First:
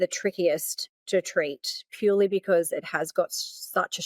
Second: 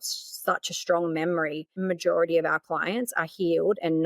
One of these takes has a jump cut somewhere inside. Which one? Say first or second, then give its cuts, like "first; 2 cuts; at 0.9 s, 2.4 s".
second; 1 cut; at 1.7 s